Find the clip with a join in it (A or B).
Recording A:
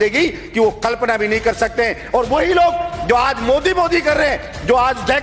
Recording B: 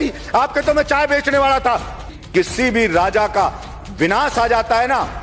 B